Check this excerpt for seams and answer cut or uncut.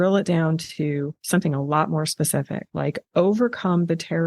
cut